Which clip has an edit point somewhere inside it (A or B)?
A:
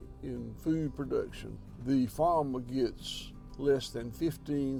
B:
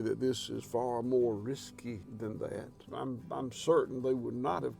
B